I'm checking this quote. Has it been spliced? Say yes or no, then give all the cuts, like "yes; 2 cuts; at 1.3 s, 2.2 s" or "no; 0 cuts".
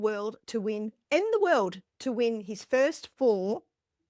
no; 0 cuts